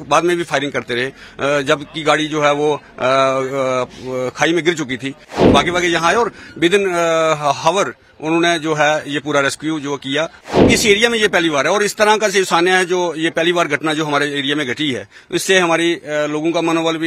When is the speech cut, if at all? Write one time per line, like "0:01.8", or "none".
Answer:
0:05.4
0:10.7